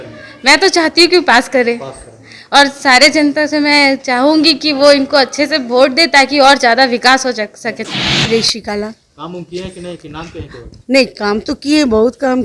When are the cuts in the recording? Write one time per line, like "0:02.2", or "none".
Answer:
0:07.9